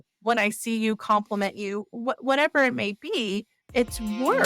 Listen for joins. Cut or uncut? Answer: cut